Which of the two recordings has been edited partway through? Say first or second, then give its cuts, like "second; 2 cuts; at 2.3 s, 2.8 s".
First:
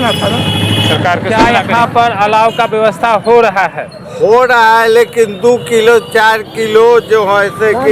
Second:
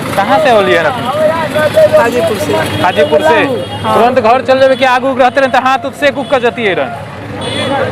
first; 1 cut; at 1.3 s